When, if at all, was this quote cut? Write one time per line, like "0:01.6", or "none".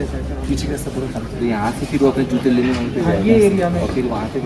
none